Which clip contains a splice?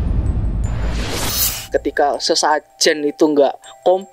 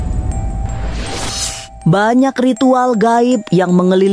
first; 1 cut; at 1.7 s

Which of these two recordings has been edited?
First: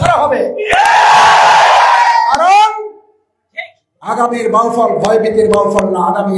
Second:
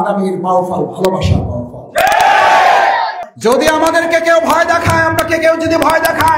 second; 1 cut; at 3.2 s

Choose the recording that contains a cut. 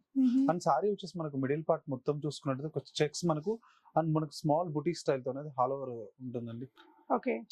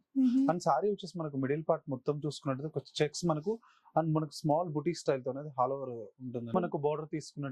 second; 1 cut; at 6.5 s

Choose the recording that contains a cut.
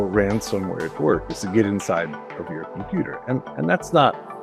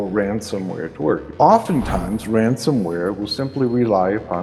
second; 1 cut; at 1.3 s

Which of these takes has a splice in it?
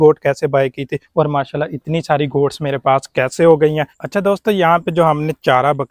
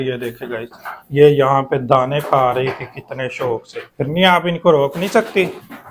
first; 1 cut; at 3.9 s

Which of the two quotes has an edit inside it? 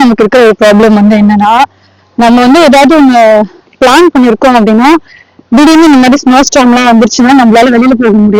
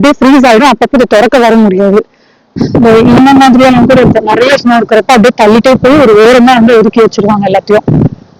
second; 1 cut; at 2.5 s

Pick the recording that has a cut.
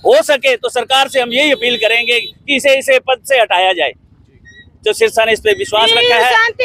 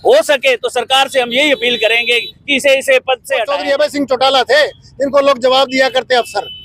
second; 1 cut; at 3.5 s

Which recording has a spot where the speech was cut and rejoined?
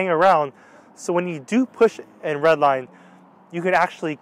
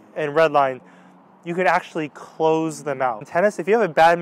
second; 1 cut; at 3.2 s

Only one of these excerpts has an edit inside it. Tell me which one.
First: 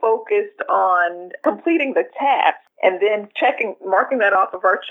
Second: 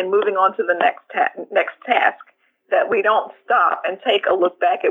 first; 2 cuts; at 1.3 s, 2.7 s

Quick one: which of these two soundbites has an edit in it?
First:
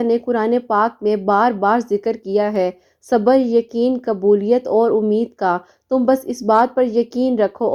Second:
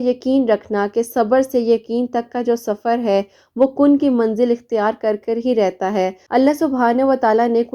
second; 1 cut; at 6.3 s

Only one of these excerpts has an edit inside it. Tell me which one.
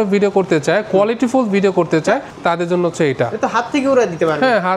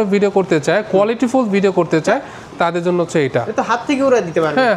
first; 1 cut; at 2.3 s

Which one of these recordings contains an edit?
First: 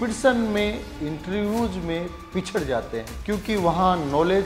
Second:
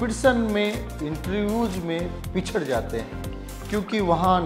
first; 1 cut; at 3.1 s

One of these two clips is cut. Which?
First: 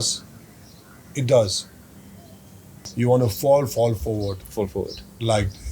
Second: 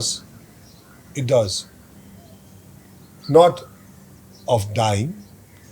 first; 1 cut; at 2.8 s

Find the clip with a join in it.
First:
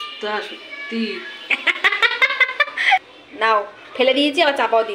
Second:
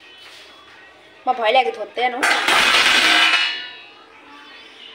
first; 1 cut; at 3.2 s

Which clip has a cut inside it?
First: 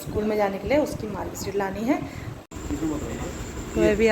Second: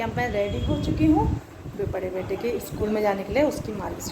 first; 1 cut; at 2.5 s

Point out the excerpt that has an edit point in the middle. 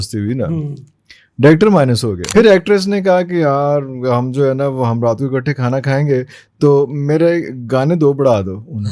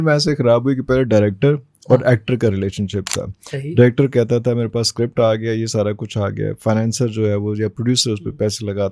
first; 1 cut; at 2.2 s

